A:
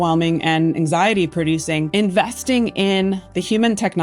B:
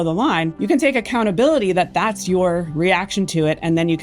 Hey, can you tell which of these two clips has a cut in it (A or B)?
A